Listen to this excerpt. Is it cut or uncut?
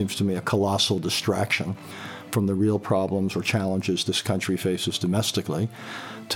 uncut